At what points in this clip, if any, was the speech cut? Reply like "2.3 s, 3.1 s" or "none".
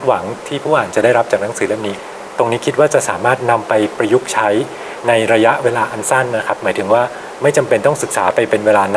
1.9 s